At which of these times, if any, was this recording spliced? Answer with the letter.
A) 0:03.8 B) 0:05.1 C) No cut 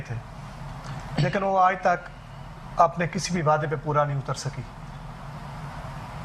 B